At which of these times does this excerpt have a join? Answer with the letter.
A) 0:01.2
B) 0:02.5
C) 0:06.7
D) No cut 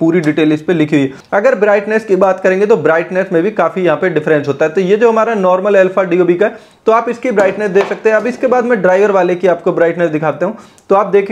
A